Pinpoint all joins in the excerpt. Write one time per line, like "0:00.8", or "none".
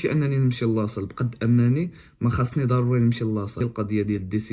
0:03.6